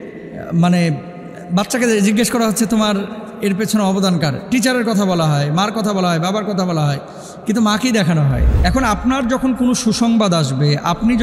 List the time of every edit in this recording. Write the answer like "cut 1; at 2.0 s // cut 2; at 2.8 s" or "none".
cut 1; at 8.5 s